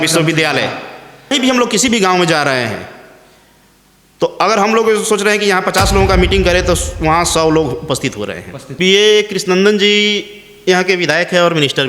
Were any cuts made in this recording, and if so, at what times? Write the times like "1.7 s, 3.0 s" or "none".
1.3 s, 8.6 s